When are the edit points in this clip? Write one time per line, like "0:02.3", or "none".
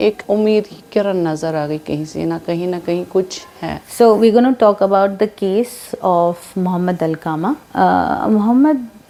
none